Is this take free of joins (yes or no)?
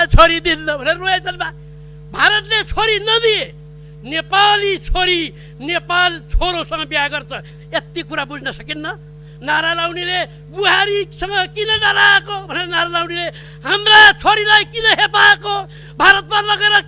yes